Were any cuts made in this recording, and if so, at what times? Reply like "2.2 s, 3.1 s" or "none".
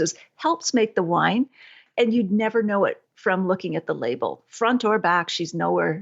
none